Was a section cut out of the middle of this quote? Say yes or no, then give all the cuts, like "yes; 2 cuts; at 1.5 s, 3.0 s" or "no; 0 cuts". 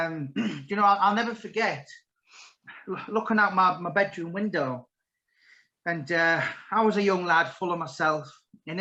no; 0 cuts